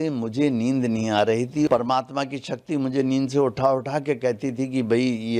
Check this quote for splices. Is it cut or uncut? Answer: cut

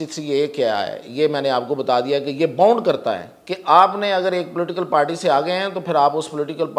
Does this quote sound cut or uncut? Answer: uncut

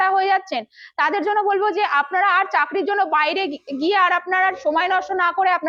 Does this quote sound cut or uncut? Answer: uncut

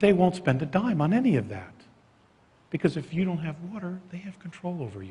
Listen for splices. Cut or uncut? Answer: cut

